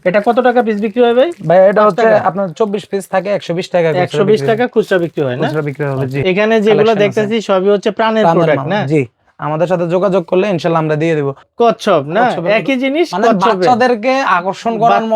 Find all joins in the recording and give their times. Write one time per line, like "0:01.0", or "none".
0:06.2
0:11.4